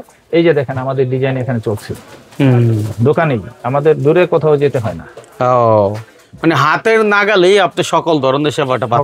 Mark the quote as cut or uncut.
uncut